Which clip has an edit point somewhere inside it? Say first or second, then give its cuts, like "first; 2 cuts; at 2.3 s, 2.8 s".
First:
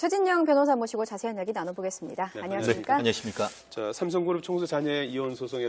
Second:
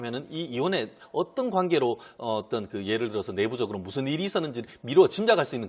second; 1 cut; at 4.0 s